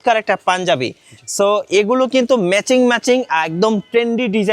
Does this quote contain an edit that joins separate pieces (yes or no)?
no